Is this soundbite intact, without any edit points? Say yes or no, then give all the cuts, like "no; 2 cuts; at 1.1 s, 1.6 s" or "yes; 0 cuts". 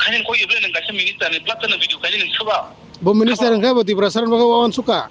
yes; 0 cuts